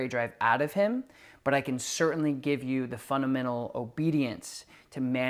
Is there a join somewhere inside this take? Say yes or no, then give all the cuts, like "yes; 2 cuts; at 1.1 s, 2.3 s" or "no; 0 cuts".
no; 0 cuts